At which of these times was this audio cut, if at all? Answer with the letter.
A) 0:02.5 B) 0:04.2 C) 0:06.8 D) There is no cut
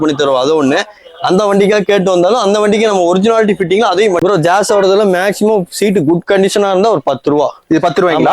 B